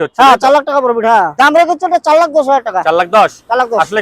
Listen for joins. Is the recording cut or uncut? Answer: cut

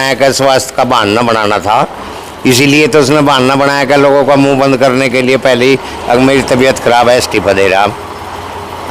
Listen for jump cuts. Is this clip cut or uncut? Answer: uncut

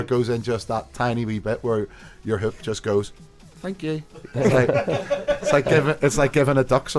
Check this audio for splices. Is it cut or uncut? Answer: uncut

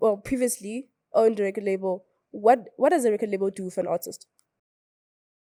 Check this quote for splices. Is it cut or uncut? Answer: uncut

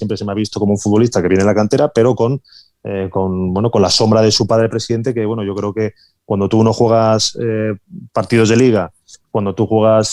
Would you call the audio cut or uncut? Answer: uncut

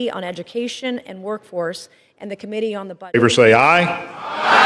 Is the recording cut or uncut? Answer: cut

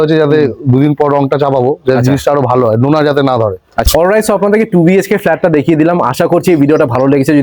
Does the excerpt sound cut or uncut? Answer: uncut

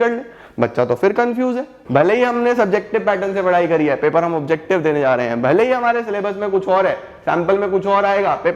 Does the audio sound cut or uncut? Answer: cut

